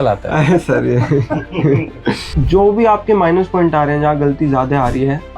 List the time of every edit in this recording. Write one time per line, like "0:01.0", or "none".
0:02.3

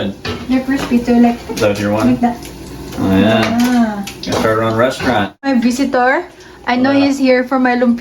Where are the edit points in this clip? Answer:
0:05.4

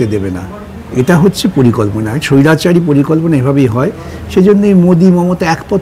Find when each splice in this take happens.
none

